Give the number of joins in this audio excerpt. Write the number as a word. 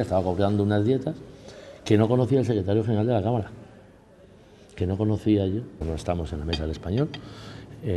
one